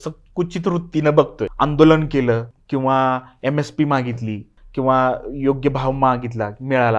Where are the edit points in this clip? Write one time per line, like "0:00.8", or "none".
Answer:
0:01.5
0:02.5
0:04.5

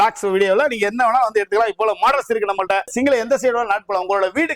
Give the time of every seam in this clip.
0:02.9

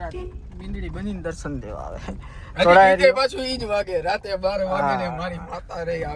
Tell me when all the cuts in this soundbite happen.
none

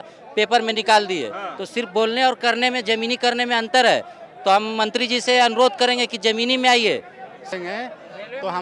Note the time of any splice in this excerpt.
0:07.5

